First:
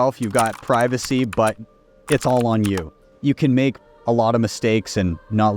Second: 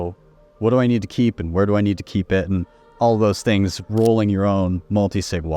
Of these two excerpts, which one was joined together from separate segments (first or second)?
first